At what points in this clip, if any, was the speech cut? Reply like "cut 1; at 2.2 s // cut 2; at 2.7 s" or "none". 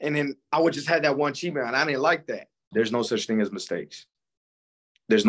cut 1; at 2.6 s

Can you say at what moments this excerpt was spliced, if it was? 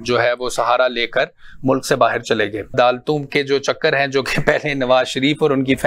cut 1; at 2.7 s

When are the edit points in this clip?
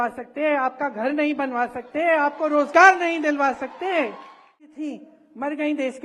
cut 1; at 4.8 s

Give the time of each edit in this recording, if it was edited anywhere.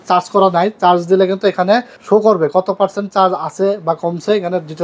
cut 1; at 1.9 s

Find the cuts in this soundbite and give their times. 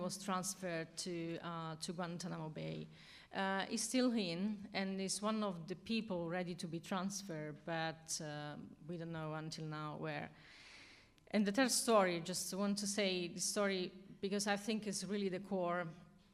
cut 1; at 7.6 s

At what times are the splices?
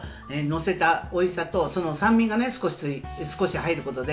none

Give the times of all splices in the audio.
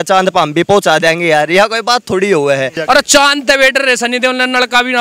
cut 1; at 2.8 s

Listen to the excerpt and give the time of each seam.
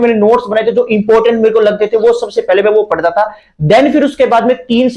none

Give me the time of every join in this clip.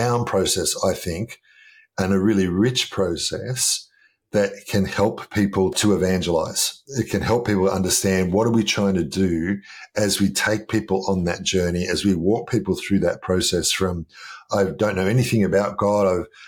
cut 1; at 5.7 s

